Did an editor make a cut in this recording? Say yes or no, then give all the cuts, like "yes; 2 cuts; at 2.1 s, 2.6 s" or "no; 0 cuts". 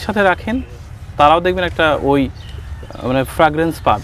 no; 0 cuts